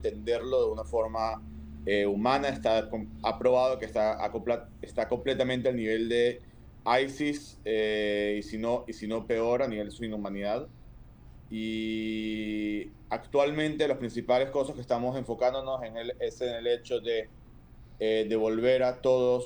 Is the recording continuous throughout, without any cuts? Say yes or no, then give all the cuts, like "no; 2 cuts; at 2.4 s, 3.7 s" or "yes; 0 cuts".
yes; 0 cuts